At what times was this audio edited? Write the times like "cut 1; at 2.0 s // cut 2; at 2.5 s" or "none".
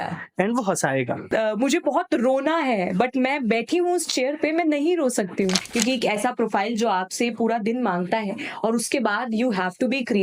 cut 1; at 1.2 s // cut 2; at 5.6 s